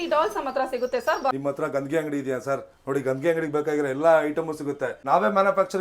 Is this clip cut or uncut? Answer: cut